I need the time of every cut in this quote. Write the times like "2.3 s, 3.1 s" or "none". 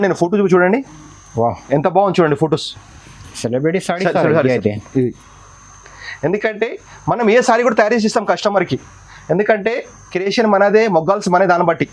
none